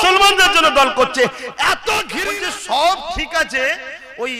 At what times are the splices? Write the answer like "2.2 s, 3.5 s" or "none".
2.2 s